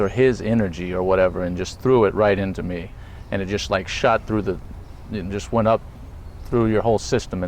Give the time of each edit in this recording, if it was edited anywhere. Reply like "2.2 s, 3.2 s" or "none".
3.0 s